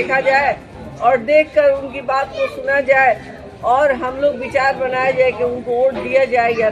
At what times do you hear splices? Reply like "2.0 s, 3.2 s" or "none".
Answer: none